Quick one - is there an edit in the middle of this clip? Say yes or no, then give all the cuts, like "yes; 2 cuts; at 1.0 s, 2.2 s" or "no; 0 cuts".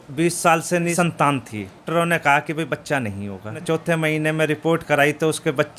yes; 3 cuts; at 0.9 s, 1.8 s, 3.6 s